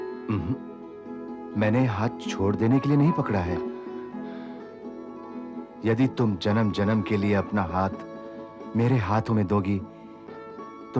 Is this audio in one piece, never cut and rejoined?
yes; 0 cuts

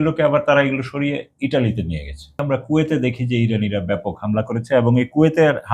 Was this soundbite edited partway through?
yes; 1 cut; at 2.4 s

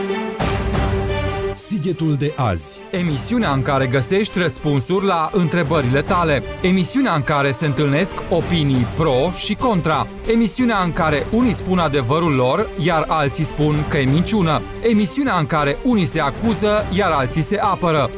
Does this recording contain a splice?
no; 0 cuts

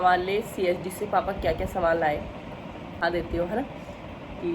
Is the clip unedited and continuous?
no; 1 cut; at 3.0 s

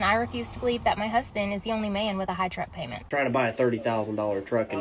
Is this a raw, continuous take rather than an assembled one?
no; 1 cut; at 3.0 s

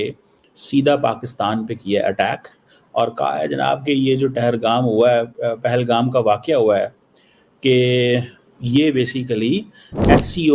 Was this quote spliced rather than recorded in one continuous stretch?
no; 0 cuts

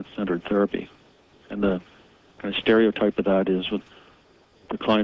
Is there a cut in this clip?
yes; 1 cut; at 2.6 s

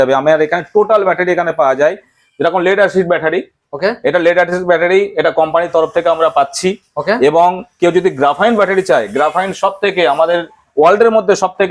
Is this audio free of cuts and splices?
yes; 0 cuts

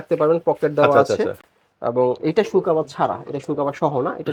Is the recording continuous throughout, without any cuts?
yes; 0 cuts

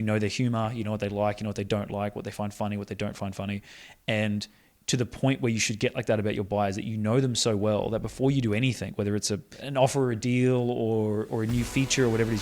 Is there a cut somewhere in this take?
yes; 1 cut; at 9.5 s

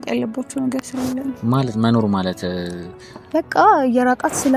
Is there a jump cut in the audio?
yes; 1 cut; at 1.4 s

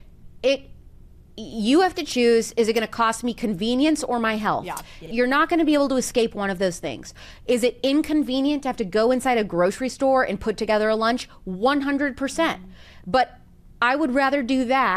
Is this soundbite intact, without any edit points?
no; 1 cut; at 5.0 s

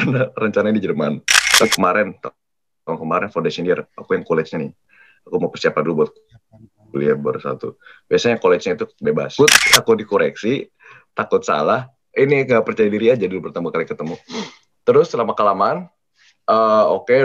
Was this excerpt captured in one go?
no; 2 cuts; at 1.6 s, 9.3 s

